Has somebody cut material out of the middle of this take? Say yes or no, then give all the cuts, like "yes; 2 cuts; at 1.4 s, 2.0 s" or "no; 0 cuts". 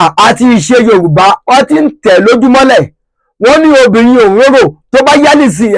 no; 0 cuts